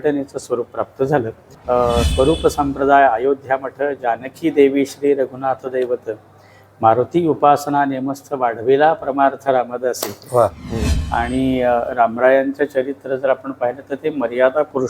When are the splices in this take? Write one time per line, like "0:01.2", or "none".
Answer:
0:01.4
0:10.6